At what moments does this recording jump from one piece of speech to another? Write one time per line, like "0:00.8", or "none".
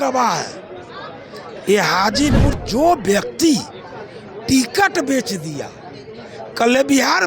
0:02.6